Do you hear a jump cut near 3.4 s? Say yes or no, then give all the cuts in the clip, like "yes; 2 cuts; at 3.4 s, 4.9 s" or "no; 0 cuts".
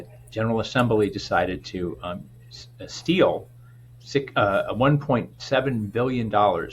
no; 0 cuts